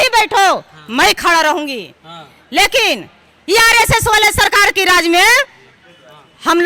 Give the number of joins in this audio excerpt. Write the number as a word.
zero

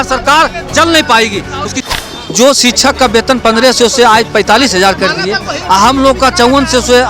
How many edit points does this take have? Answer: one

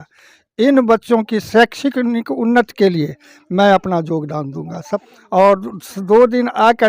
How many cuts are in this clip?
one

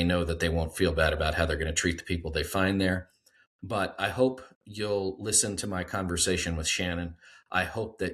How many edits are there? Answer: zero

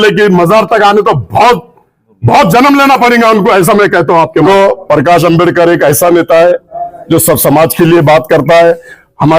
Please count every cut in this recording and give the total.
one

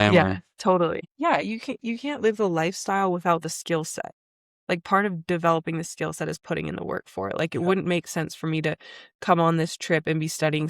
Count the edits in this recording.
one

